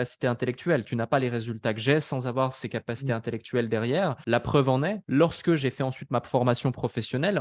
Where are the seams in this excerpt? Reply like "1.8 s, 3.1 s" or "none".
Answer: 4.2 s, 5.0 s